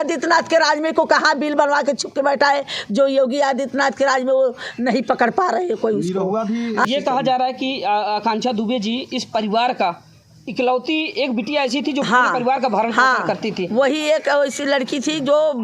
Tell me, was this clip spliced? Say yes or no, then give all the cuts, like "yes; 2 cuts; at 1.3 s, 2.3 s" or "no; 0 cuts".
yes; 1 cut; at 6.9 s